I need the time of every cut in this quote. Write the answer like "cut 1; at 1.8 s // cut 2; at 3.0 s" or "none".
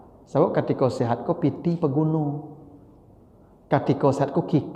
none